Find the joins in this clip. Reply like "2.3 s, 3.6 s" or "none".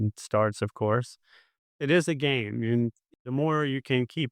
3.3 s